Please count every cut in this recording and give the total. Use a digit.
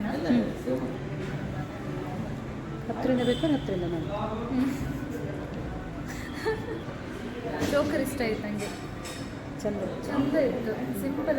2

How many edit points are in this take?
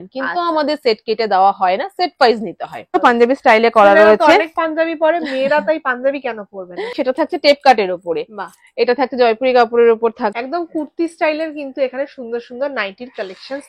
3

